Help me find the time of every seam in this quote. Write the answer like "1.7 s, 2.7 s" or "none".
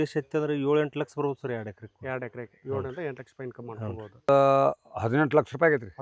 4.3 s